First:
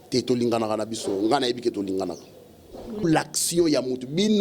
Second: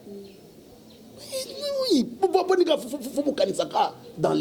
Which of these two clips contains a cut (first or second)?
first